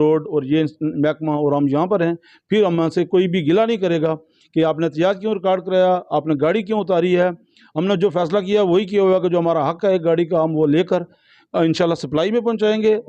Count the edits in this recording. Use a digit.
0